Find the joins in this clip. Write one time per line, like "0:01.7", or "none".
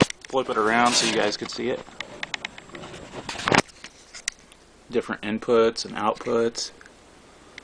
none